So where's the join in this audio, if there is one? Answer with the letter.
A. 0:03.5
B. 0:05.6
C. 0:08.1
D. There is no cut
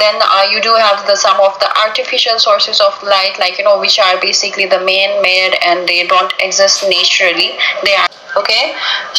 C